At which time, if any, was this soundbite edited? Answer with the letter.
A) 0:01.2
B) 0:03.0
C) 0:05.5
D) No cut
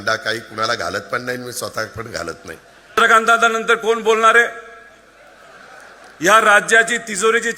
B